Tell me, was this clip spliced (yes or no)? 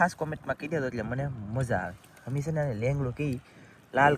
no